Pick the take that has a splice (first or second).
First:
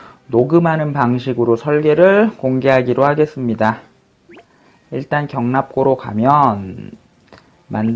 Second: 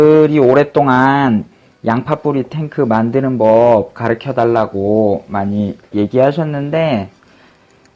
first